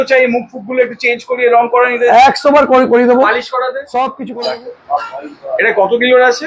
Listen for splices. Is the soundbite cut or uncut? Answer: cut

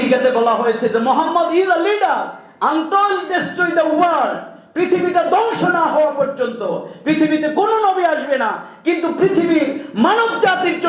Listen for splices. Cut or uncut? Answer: uncut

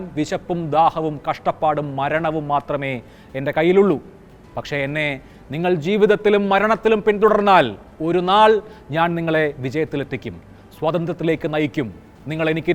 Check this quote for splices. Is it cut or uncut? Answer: uncut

